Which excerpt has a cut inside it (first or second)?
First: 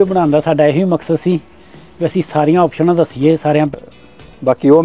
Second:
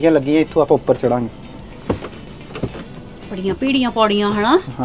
first